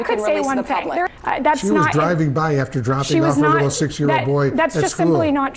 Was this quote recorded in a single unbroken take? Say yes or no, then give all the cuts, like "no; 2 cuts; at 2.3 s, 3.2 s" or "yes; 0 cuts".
no; 1 cut; at 1.1 s